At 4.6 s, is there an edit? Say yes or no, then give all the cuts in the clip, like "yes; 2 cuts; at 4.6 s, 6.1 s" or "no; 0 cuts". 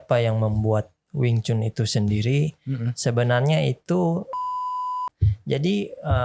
yes; 1 cut; at 4.6 s